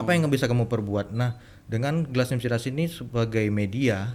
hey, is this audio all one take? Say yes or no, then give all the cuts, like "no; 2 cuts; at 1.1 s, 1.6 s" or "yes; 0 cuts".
yes; 0 cuts